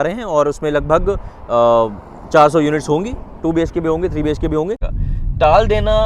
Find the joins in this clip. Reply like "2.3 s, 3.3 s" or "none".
4.9 s